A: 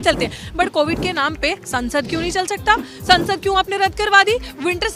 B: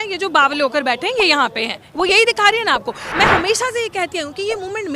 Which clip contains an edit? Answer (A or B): B